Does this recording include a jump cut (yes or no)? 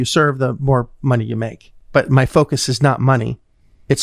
no